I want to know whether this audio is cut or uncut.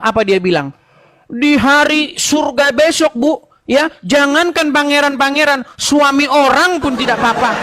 uncut